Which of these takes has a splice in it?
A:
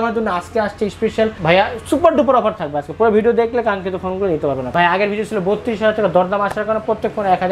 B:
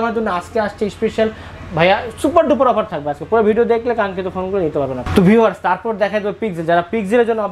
A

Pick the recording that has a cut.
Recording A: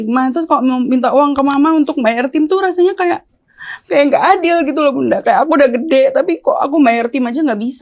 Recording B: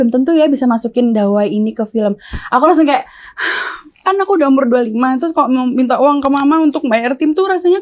B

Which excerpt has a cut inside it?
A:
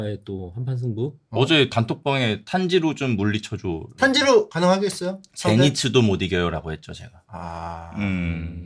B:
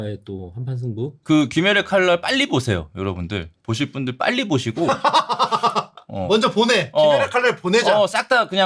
B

